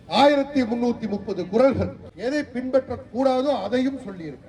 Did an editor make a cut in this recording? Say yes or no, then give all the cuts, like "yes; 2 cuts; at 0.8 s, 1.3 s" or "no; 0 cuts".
yes; 1 cut; at 2.0 s